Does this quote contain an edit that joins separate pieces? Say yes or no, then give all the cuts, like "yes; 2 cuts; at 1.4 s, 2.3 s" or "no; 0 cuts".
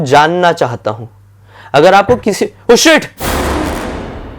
yes; 1 cut; at 3.1 s